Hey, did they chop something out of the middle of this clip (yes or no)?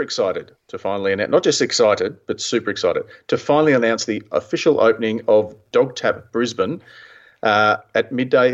no